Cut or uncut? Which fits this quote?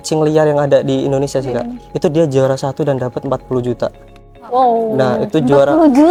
uncut